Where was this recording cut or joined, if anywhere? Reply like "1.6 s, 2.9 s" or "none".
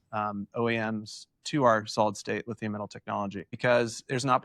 3.5 s